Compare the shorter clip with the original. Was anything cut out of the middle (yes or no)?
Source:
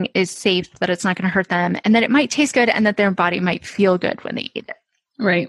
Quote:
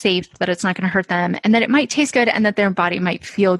no